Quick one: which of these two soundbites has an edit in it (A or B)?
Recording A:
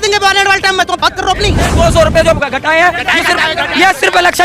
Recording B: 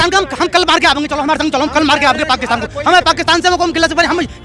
A